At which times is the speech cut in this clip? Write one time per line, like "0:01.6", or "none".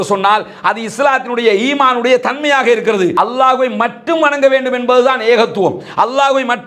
0:03.1